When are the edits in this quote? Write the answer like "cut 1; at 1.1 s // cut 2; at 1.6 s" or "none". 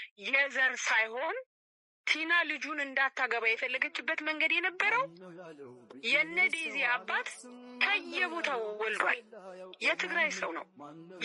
none